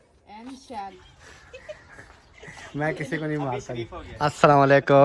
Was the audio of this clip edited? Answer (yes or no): yes